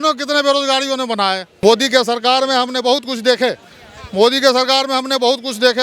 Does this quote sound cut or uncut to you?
cut